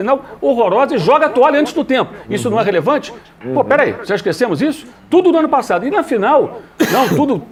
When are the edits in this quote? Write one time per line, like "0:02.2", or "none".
none